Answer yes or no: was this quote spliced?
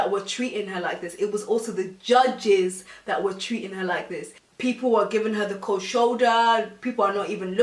no